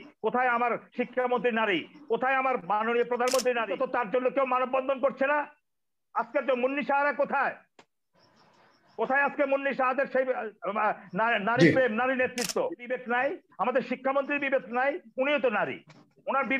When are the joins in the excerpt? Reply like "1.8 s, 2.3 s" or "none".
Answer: 3.7 s, 12.9 s

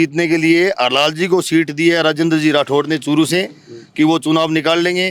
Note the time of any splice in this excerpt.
none

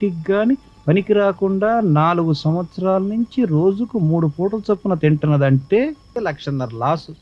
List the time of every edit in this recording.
6.2 s

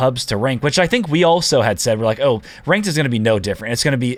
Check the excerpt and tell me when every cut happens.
none

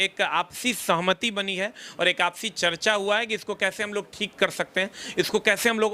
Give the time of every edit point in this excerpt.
none

